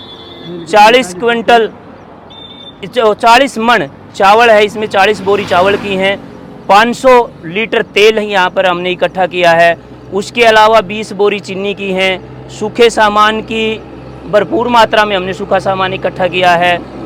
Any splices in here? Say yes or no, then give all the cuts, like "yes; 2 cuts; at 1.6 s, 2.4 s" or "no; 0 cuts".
no; 0 cuts